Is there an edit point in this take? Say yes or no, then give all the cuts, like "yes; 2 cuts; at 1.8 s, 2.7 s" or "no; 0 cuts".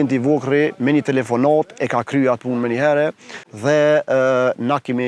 no; 0 cuts